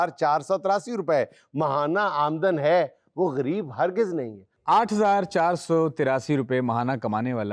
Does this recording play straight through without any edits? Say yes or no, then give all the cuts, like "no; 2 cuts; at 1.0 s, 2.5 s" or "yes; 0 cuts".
no; 1 cut; at 4.6 s